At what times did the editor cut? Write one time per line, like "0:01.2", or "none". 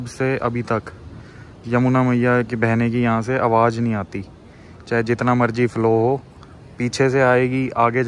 none